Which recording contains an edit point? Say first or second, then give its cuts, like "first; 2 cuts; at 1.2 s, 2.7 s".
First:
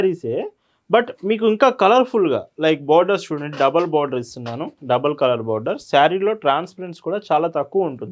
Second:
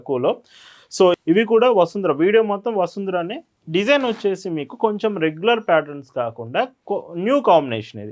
second; 1 cut; at 1.1 s